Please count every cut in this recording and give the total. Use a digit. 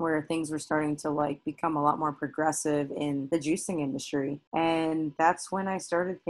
2